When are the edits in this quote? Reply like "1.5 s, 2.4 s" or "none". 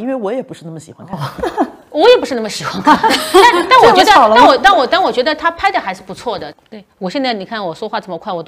6.5 s